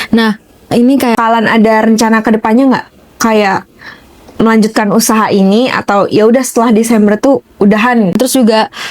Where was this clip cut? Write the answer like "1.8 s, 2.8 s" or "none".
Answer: 1.2 s, 8.1 s